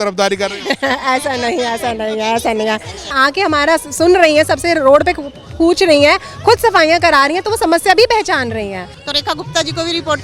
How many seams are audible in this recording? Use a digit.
2